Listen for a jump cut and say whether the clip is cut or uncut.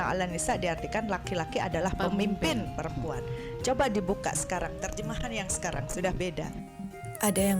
cut